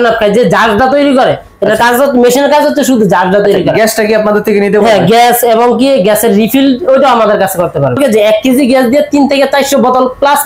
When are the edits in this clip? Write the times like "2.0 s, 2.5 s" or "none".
8.0 s